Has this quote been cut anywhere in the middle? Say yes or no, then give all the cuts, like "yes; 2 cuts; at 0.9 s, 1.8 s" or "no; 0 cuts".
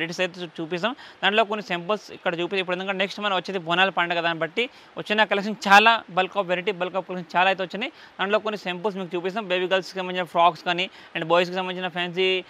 no; 0 cuts